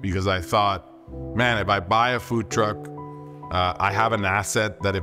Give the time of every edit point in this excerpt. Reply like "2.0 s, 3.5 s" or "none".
none